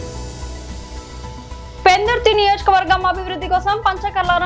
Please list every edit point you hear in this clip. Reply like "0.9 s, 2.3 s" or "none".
1.8 s